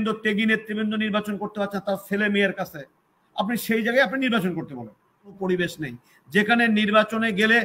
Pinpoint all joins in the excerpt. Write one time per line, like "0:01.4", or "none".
0:05.4